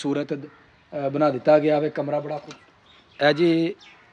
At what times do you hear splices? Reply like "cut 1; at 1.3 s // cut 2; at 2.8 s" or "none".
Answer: cut 1; at 2.3 s